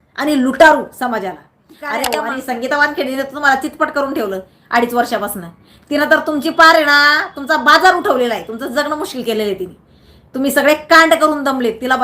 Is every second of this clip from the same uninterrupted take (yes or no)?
no